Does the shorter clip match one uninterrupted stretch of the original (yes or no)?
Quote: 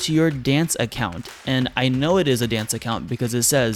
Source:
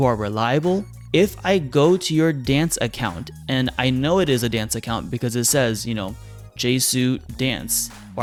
yes